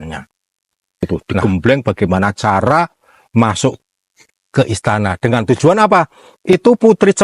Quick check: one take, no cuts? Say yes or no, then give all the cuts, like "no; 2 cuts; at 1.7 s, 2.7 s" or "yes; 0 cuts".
no; 1 cut; at 1.0 s